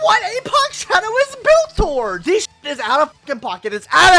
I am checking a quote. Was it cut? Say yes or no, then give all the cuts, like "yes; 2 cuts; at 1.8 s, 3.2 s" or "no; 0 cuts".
yes; 1 cut; at 2.2 s